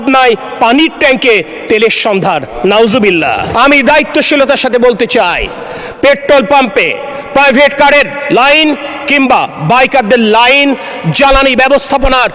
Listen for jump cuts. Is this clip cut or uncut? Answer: cut